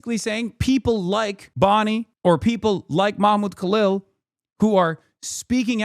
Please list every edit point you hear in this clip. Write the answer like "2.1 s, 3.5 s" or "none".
1.4 s